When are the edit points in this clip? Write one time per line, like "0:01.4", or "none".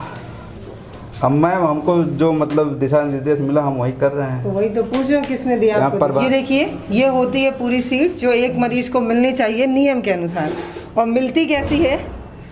0:06.2